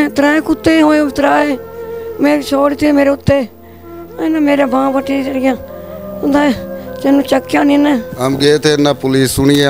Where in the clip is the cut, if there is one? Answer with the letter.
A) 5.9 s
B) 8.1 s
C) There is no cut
B